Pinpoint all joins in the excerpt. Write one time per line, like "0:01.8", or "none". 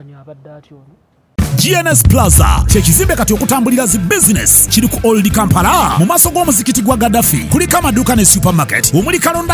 0:01.3